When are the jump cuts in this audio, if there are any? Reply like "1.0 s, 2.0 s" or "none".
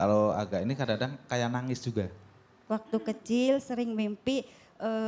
2.7 s

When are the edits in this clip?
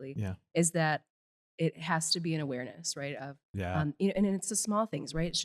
none

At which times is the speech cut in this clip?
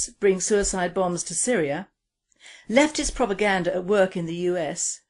3.8 s

